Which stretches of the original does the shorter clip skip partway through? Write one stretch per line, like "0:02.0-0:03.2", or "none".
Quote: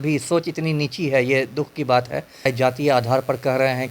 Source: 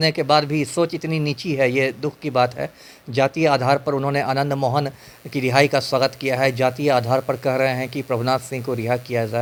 0:02.9-0:06.5